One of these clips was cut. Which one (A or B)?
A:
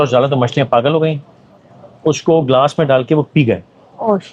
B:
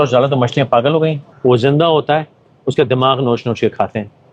B